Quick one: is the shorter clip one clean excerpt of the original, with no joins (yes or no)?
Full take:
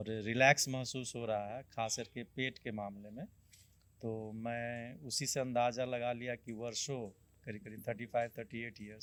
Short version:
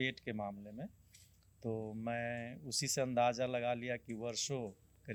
yes